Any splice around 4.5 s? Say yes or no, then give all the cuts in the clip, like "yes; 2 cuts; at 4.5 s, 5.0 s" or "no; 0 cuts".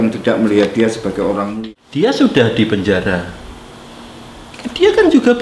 no; 1 cut; at 1.5 s